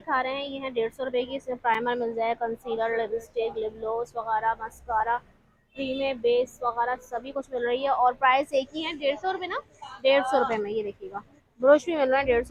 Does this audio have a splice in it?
no; 0 cuts

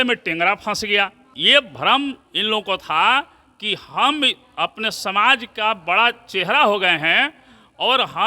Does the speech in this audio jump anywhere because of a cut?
yes; 1 cut; at 1.3 s

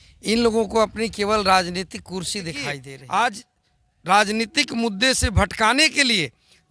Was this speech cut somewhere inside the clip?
yes; 1 cut; at 2.9 s

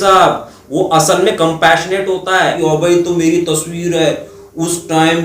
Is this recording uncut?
no; 1 cut; at 2.6 s

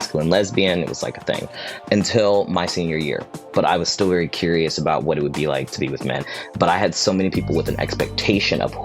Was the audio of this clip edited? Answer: yes; 2 cuts; at 3.3 s, 6.2 s

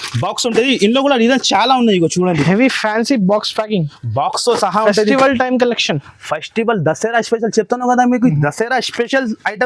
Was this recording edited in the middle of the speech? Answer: no; 0 cuts

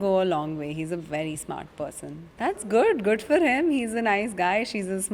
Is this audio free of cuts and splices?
no; 1 cut; at 2.2 s

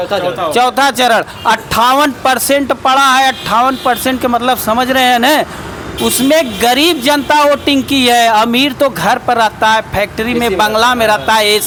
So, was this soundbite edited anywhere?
no; 0 cuts

